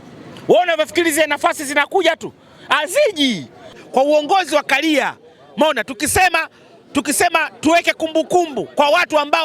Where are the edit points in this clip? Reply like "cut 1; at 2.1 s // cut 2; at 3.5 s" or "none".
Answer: cut 1; at 3.7 s